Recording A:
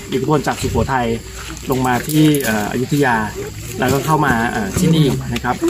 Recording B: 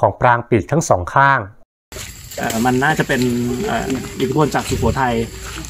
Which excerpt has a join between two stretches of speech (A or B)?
B